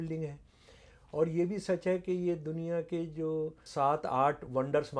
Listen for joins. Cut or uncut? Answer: cut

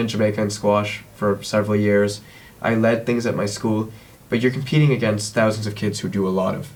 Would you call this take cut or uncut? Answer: uncut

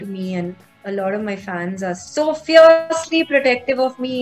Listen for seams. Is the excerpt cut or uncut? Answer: cut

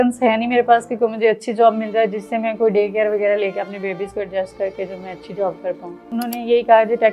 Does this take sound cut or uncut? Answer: cut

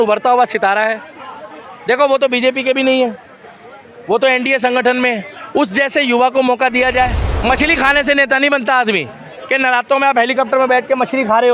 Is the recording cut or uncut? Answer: cut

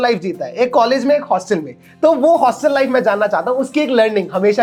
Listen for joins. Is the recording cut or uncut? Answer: uncut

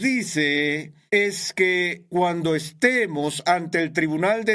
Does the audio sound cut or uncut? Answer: cut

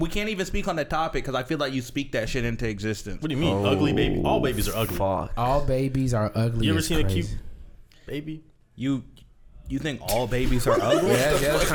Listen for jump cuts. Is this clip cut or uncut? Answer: uncut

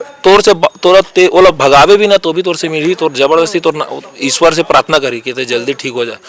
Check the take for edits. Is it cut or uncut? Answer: uncut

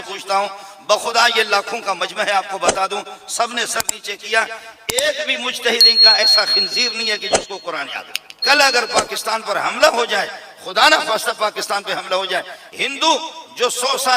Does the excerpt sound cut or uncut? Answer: cut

